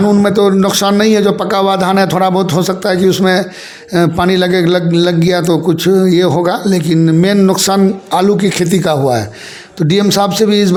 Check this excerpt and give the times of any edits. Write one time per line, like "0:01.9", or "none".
none